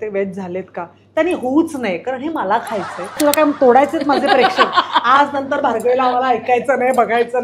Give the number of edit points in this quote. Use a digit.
1